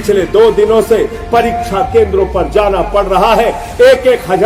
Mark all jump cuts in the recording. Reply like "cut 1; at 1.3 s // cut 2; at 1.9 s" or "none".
none